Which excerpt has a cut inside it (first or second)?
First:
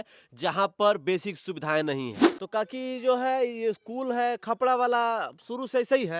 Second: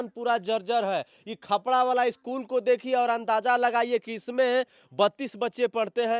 first